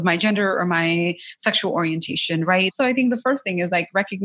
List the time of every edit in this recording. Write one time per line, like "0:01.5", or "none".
0:02.7